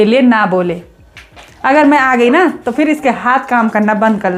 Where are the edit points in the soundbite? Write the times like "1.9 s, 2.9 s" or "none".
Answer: none